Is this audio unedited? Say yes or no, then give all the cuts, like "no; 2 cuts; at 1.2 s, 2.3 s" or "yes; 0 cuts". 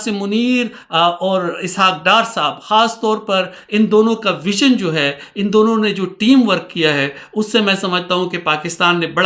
yes; 0 cuts